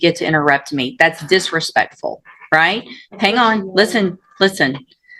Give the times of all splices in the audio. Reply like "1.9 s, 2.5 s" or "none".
none